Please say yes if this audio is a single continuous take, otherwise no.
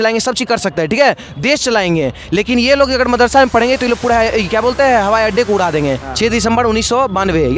no